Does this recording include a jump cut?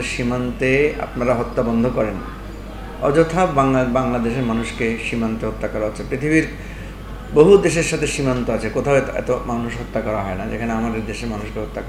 no; 0 cuts

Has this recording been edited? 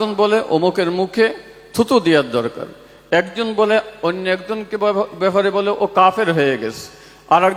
no; 0 cuts

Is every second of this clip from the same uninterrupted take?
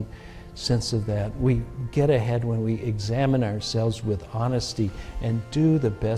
yes; 0 cuts

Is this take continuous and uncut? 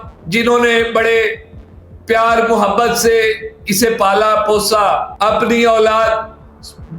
no; 1 cut; at 5.1 s

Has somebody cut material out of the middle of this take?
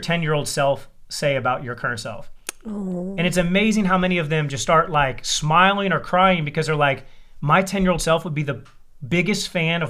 no; 0 cuts

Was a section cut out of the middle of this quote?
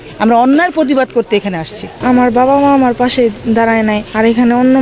yes; 1 cut; at 1.9 s

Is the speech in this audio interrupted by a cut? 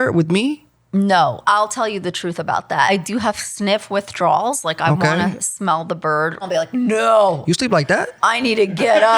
yes; 3 cuts; at 1.4 s, 2.9 s, 6.4 s

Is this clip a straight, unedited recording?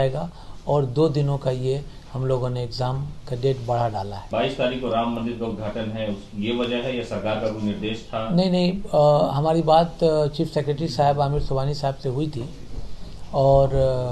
no; 1 cut; at 4.2 s

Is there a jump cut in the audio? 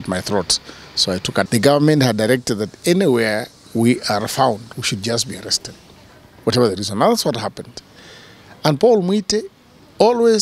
yes; 1 cut; at 1.5 s

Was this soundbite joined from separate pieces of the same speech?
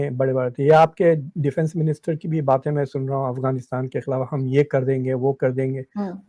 no; 0 cuts

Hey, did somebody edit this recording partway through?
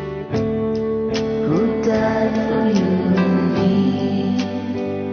no; 0 cuts

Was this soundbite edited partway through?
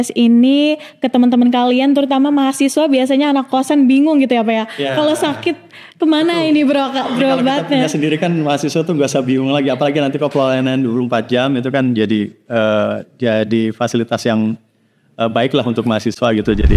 no; 0 cuts

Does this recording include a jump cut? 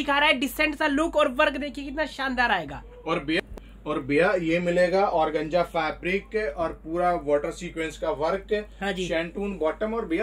yes; 1 cut; at 3.4 s

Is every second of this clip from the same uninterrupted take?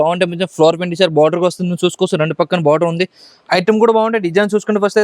yes; 0 cuts

